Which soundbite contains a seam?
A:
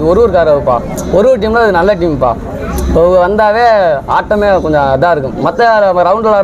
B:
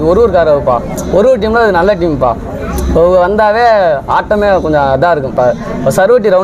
B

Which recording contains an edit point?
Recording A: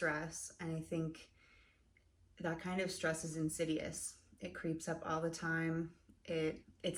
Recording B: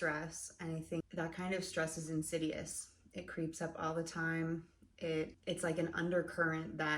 B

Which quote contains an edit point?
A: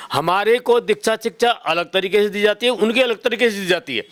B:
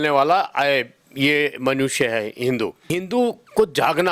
B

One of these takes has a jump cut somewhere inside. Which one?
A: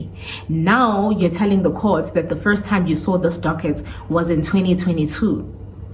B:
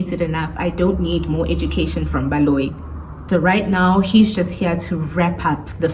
B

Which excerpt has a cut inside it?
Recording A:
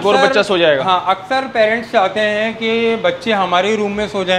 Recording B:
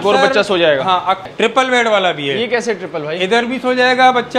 B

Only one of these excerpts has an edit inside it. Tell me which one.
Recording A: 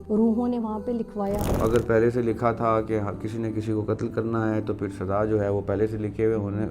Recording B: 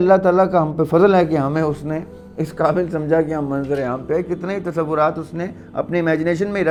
A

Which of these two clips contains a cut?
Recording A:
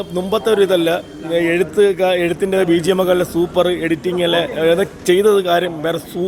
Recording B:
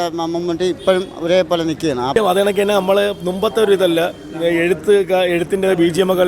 B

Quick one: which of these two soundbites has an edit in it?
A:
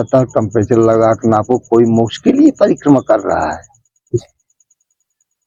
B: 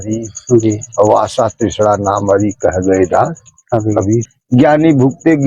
B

